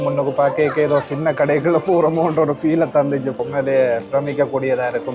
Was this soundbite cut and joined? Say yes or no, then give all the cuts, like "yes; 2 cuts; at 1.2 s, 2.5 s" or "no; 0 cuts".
yes; 1 cut; at 3.4 s